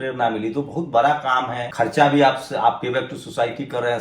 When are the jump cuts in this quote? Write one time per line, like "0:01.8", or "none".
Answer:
0:01.6